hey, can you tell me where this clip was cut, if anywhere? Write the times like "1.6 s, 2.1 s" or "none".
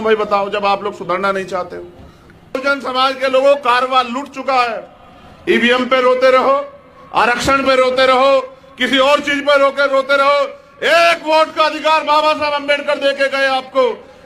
2.6 s